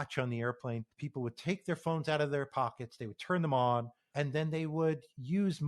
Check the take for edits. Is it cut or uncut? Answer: cut